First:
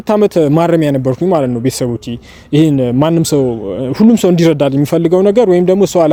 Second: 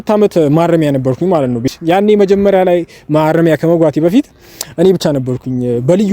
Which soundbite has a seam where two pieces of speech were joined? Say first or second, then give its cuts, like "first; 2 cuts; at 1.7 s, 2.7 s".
second; 1 cut; at 1.7 s